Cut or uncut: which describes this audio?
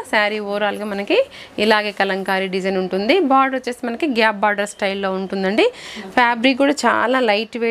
uncut